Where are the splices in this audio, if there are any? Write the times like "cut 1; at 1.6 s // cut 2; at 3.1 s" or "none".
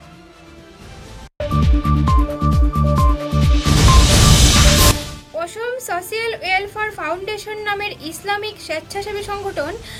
none